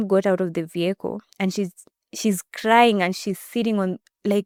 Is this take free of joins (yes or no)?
yes